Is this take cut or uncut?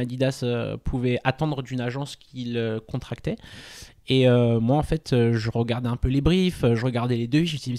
uncut